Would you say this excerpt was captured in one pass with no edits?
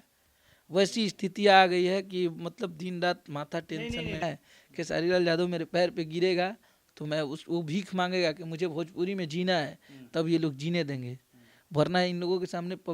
no; 1 cut; at 4.2 s

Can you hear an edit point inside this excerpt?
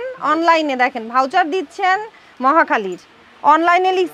no; 0 cuts

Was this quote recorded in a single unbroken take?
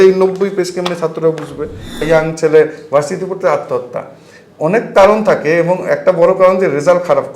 no; 1 cut; at 2.0 s

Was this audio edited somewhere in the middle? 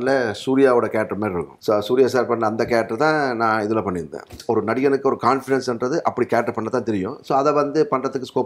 yes; 2 cuts; at 1.5 s, 4.4 s

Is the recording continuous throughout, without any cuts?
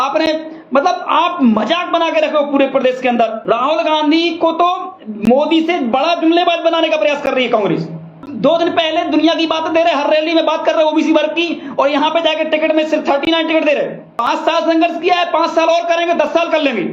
no; 3 cuts; at 3.4 s, 8.2 s, 14.1 s

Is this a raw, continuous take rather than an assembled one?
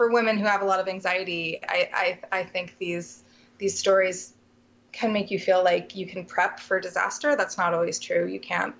yes; 0 cuts

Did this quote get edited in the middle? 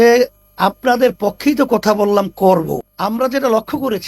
yes; 1 cut; at 2.9 s

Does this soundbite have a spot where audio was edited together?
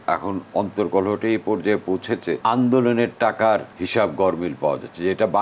yes; 2 cuts; at 2.4 s, 3.8 s

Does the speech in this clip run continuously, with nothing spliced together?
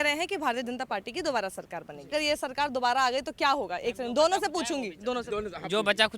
no; 1 cut; at 2.1 s

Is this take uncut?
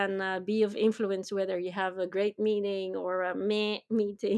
yes; 0 cuts

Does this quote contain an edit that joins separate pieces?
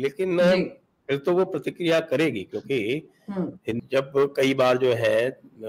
yes; 1 cut; at 3.8 s

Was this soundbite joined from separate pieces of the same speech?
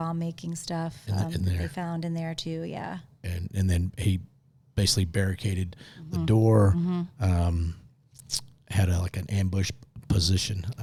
no; 0 cuts

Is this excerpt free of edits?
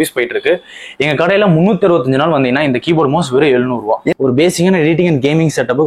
no; 1 cut; at 4.1 s

